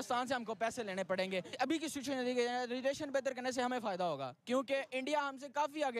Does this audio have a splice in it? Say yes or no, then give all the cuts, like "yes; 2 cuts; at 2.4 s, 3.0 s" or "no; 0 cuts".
yes; 1 cut; at 1.6 s